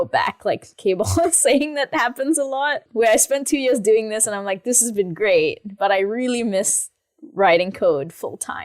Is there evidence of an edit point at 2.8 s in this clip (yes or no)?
yes